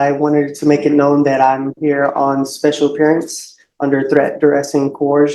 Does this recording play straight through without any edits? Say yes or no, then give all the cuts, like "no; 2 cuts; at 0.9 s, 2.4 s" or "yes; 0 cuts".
yes; 0 cuts